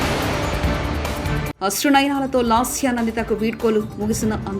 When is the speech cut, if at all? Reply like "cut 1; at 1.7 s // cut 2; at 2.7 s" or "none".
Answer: cut 1; at 1.5 s